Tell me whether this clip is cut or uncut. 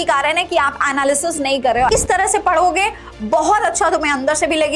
cut